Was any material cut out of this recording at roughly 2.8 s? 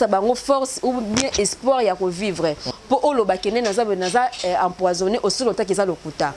yes; 1 cut; at 2.8 s

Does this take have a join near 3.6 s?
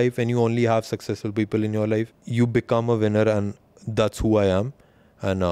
no; 1 cut; at 2.2 s

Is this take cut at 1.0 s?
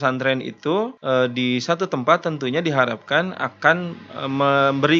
yes; 1 cut; at 1.0 s

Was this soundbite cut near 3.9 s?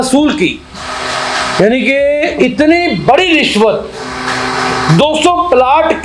no; 0 cuts

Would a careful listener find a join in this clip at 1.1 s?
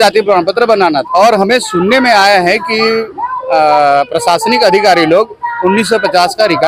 yes; 1 cut; at 1.1 s

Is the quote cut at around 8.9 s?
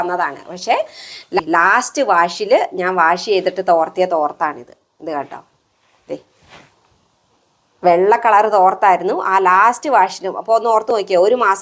no; 1 cut; at 1.4 s

